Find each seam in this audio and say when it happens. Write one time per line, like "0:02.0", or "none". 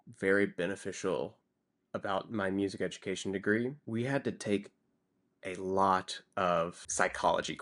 0:03.8